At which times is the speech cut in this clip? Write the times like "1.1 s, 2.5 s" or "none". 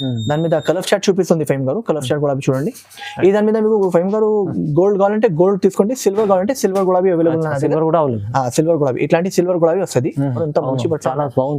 10.4 s